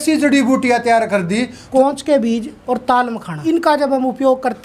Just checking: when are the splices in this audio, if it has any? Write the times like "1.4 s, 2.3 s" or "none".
1.6 s, 2.5 s, 3.4 s